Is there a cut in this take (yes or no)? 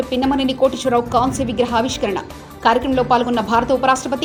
no